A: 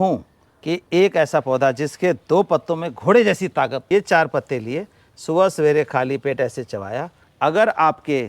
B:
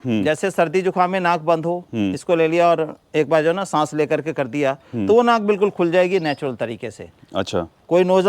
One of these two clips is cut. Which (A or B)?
A